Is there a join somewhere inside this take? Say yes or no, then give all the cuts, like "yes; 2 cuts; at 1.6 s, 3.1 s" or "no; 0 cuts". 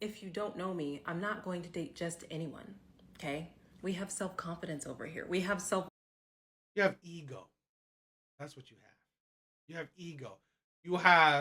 no; 0 cuts